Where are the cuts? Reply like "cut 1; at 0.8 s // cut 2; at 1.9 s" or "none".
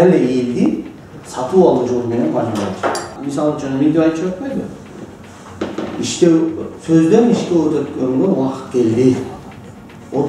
cut 1; at 3.1 s